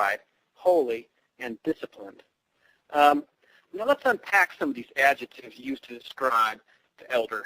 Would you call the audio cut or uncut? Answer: cut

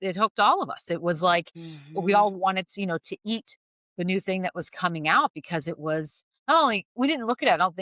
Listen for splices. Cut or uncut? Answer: uncut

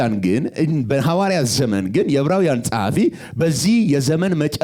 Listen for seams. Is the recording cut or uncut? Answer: uncut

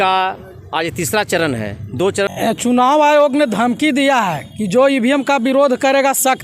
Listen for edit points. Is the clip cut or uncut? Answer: cut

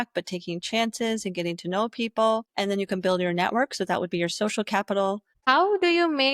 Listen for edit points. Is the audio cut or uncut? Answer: cut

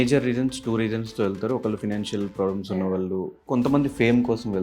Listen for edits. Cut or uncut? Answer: cut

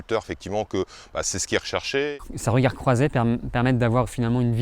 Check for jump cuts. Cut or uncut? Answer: cut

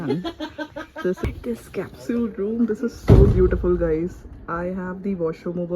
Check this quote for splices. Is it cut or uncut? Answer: cut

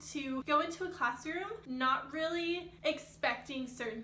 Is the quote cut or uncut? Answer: uncut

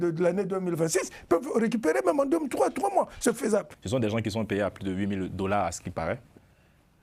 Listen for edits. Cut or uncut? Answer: cut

